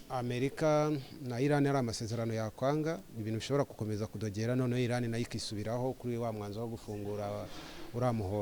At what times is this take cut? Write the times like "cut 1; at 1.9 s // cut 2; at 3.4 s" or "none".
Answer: none